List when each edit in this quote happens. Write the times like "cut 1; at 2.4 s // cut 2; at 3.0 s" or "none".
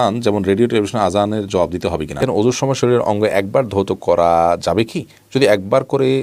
cut 1; at 2.2 s